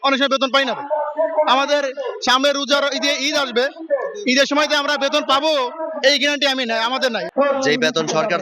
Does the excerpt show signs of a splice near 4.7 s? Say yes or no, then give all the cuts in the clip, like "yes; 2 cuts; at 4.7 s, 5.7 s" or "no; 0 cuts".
no; 1 cut; at 7.2 s